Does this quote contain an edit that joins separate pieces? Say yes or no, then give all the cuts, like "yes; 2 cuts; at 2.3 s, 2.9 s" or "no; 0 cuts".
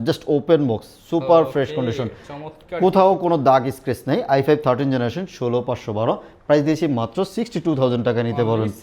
no; 0 cuts